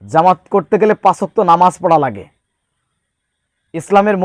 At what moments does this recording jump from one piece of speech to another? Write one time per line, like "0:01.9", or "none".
none